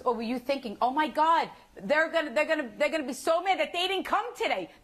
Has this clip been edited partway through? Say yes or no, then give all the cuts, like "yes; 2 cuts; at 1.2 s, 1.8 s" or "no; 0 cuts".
no; 0 cuts